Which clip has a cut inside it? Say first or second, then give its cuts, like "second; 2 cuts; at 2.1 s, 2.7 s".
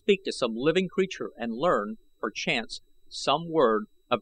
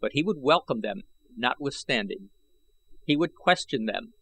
second; 1 cut; at 2.6 s